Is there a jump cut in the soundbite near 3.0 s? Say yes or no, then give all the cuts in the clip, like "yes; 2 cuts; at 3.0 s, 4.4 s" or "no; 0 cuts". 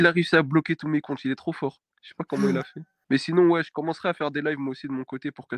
yes; 1 cut; at 3.0 s